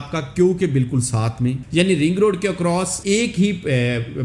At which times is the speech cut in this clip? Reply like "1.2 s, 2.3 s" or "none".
1.6 s, 2.9 s